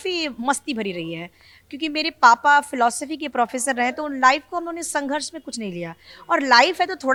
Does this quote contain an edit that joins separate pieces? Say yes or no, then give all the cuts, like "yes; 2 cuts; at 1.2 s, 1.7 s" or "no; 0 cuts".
no; 0 cuts